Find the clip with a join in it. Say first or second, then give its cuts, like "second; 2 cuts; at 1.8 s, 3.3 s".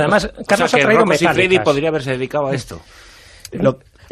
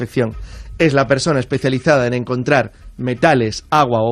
second; 1 cut; at 1.6 s